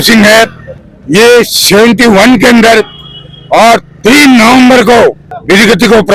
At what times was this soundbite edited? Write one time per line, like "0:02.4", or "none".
none